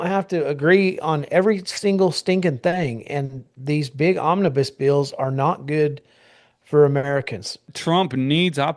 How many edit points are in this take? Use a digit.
1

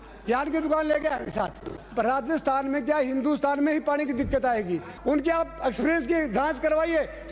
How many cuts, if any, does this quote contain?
2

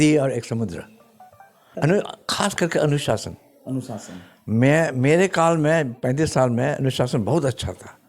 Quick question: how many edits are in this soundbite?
1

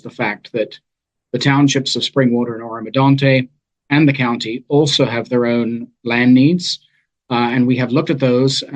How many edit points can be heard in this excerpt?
0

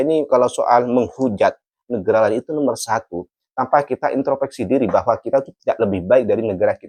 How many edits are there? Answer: 0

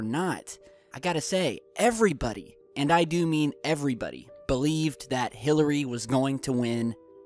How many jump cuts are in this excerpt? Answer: 1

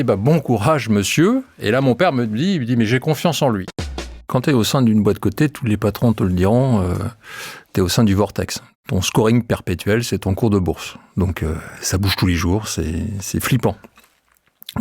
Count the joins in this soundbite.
2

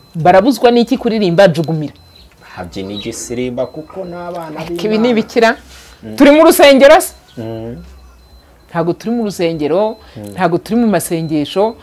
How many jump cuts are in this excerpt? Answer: 0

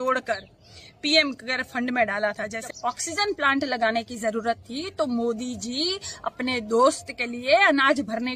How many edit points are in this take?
1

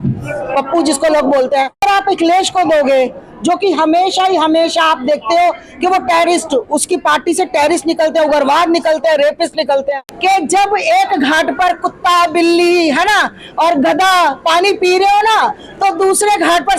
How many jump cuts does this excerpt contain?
2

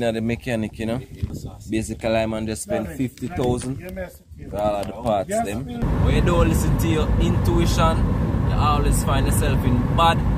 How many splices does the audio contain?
2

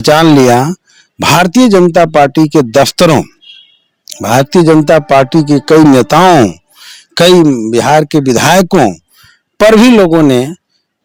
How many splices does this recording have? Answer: 0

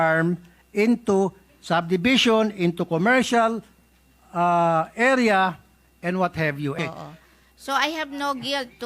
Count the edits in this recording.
1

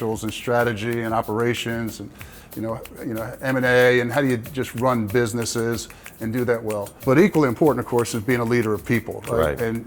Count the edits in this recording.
1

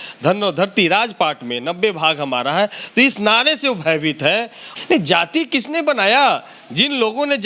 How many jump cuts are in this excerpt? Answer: 1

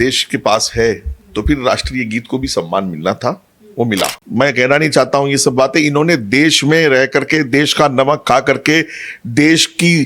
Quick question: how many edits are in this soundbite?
1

